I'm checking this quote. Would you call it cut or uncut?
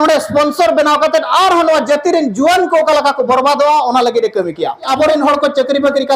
cut